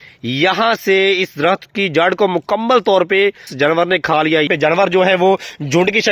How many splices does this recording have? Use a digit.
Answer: 2